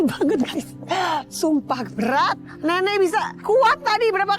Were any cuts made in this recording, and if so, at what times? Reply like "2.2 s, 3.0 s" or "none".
2.4 s, 3.3 s

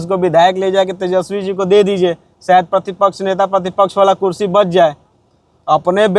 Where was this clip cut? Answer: none

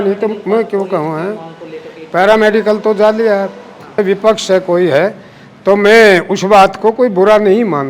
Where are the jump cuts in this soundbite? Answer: 4.0 s

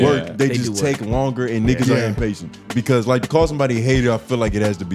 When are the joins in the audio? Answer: 2.6 s

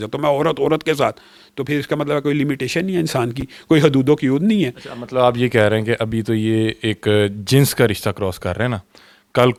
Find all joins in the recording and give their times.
none

